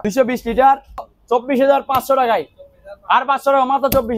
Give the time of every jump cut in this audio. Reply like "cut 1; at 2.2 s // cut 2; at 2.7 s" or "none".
cut 1; at 1.1 s